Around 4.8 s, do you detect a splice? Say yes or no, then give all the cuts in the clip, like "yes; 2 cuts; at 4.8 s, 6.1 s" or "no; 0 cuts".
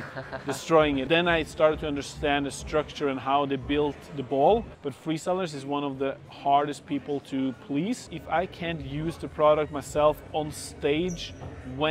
yes; 3 cuts; at 1.1 s, 4.8 s, 8.1 s